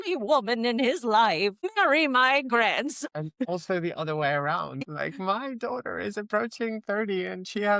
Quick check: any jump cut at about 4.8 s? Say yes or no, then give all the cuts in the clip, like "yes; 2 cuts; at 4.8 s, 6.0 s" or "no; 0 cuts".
yes; 3 cuts; at 1.7 s, 3.1 s, 4.8 s